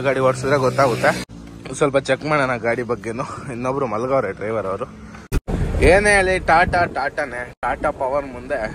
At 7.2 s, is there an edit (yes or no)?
no